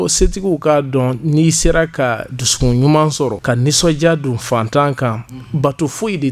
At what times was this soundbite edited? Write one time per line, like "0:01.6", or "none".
0:03.4